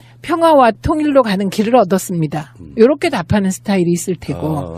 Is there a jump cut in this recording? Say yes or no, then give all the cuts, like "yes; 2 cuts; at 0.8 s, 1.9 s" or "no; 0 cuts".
yes; 1 cut; at 2.0 s